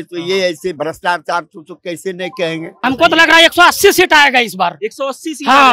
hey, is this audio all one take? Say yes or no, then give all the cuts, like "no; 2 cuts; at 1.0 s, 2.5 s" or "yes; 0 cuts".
no; 1 cut; at 2.7 s